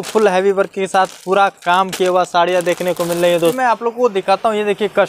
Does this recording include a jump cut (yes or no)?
yes